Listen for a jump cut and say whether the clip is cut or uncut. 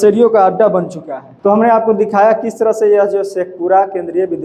uncut